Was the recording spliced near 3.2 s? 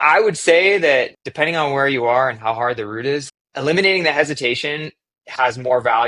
yes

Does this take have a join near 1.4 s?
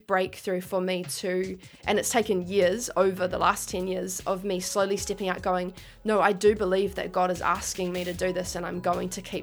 no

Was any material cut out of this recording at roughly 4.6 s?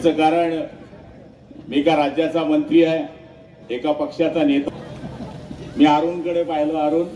yes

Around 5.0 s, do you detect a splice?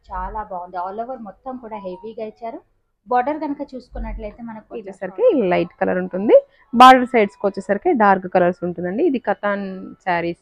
yes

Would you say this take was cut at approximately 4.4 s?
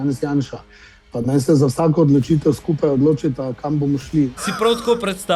yes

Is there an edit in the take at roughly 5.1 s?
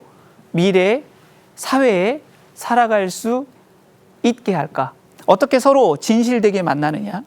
yes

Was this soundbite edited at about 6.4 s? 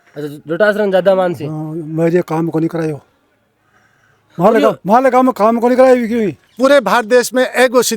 yes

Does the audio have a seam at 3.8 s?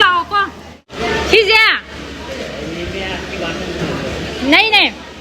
no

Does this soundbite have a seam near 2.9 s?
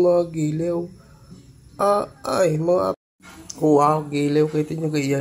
yes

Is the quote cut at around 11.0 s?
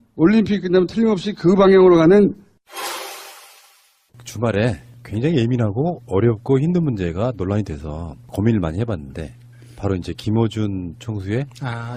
no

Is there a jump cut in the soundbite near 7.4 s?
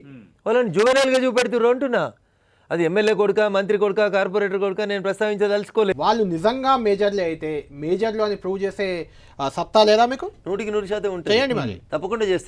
no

